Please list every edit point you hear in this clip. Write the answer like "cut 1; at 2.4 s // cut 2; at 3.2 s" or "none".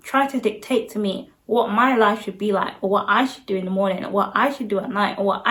none